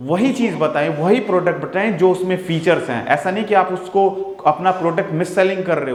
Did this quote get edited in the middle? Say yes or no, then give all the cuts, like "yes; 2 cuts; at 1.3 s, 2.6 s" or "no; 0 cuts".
no; 0 cuts